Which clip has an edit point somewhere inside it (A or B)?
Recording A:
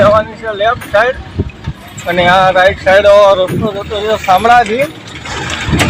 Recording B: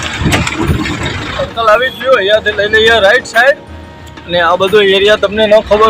B